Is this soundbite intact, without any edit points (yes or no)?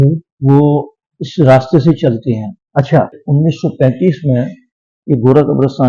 no